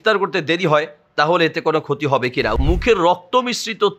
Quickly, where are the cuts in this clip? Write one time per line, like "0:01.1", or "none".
0:02.6